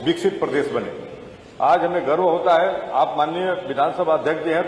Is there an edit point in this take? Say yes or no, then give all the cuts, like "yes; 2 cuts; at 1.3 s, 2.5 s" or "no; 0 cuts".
no; 0 cuts